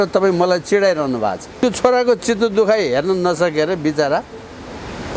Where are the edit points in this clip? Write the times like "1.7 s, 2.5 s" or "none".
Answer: 1.5 s